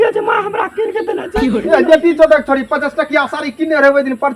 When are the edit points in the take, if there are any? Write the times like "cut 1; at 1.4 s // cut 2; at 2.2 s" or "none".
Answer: cut 1; at 1.6 s